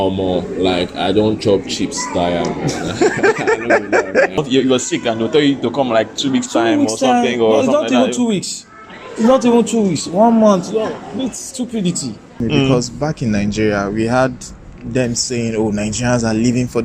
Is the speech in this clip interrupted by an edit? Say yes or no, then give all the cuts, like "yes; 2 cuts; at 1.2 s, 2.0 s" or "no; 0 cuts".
yes; 2 cuts; at 4.4 s, 12.4 s